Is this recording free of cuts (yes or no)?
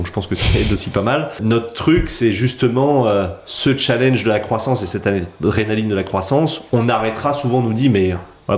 no